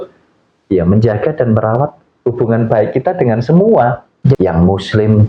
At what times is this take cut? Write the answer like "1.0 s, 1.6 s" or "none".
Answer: 4.4 s